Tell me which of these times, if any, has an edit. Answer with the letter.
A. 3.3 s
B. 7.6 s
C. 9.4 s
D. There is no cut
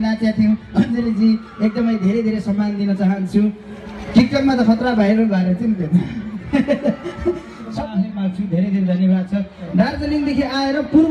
B